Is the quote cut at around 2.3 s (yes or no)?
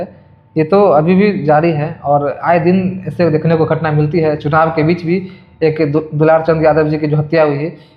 no